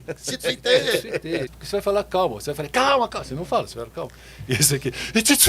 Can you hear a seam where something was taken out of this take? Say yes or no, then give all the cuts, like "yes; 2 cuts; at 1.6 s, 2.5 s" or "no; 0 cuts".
yes; 1 cut; at 1.6 s